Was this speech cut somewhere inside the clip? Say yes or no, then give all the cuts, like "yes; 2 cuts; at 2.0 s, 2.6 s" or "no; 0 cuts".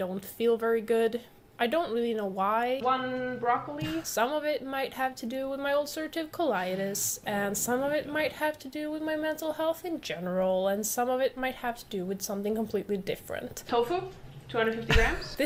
no; 0 cuts